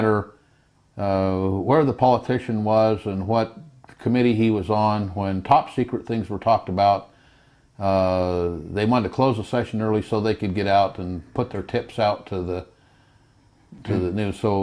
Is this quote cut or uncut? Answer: uncut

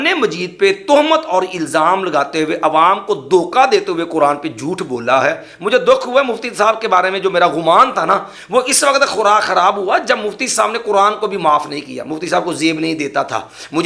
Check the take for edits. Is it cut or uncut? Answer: uncut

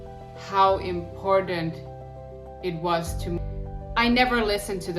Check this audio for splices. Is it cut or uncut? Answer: cut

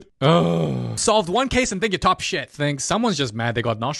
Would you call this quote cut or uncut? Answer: cut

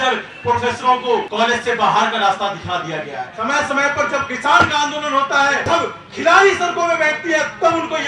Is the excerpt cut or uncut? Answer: cut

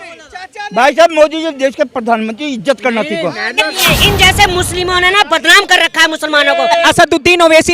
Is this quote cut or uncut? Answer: cut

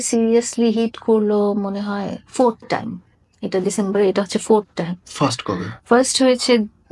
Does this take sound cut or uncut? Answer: uncut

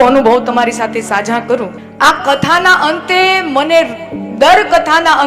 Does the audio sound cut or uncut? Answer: cut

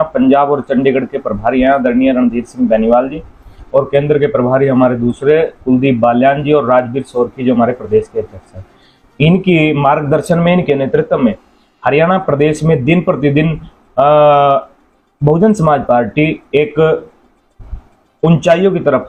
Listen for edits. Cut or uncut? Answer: uncut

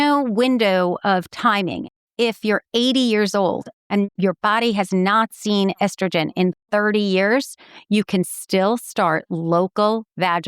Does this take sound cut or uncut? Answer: cut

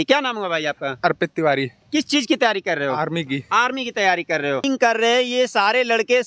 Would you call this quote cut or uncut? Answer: cut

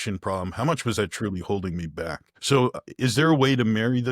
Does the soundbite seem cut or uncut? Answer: cut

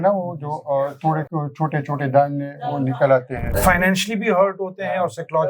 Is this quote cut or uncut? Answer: cut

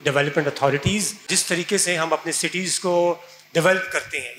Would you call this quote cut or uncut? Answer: cut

